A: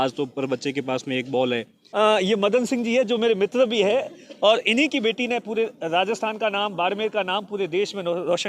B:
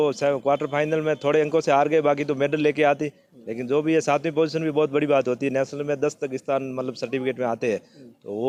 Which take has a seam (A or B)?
A